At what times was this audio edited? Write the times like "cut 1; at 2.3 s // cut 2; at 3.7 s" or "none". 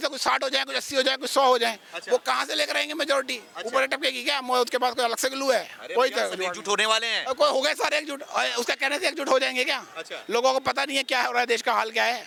none